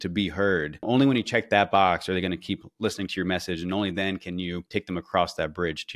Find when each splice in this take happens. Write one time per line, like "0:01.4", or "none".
0:00.9
0:04.6